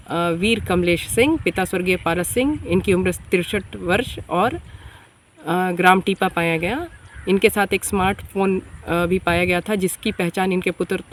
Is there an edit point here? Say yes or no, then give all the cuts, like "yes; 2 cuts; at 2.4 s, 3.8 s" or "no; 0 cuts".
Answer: no; 0 cuts